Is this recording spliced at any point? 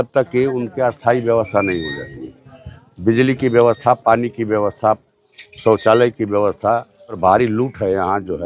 yes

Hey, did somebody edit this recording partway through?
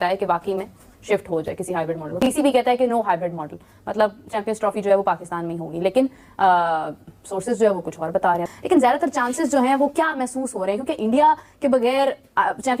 no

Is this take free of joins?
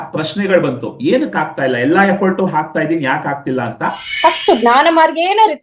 no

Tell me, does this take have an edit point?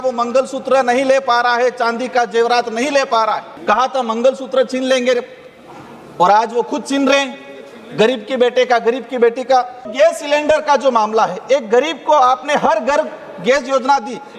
yes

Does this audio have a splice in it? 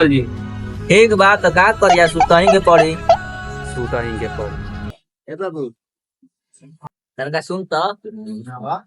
yes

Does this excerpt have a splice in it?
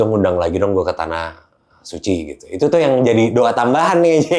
no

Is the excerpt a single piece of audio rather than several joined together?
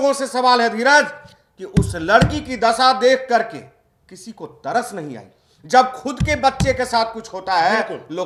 yes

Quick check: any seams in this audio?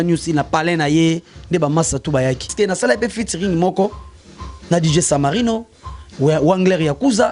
yes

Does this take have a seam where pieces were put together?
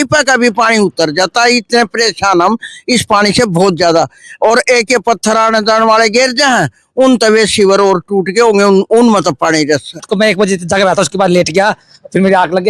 yes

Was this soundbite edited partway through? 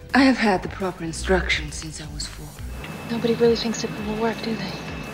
yes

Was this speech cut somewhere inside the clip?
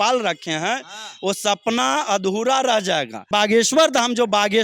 yes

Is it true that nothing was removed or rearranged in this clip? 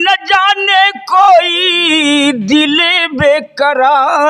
yes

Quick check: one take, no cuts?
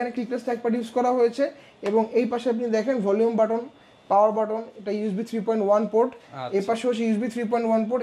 yes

